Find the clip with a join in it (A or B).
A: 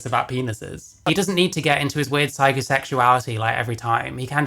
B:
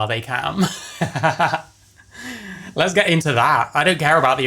A